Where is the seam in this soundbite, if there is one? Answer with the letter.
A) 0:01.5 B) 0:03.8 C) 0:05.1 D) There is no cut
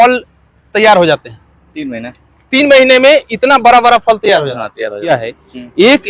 C